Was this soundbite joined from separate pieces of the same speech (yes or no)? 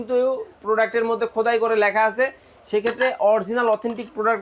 no